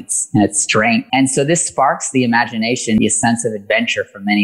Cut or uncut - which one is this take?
cut